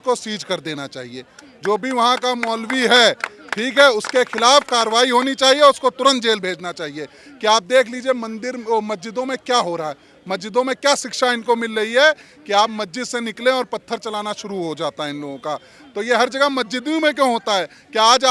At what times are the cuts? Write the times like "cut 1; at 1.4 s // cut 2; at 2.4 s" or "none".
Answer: none